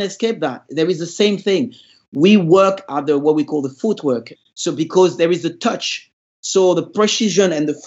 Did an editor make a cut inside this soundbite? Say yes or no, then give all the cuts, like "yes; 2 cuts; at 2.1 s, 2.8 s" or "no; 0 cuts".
yes; 1 cut; at 4.3 s